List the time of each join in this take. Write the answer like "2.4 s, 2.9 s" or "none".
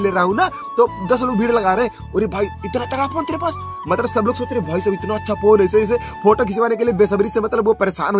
none